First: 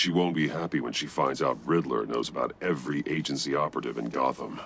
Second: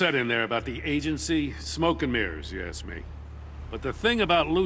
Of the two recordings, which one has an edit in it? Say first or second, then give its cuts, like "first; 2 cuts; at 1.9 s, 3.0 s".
second; 1 cut; at 3.7 s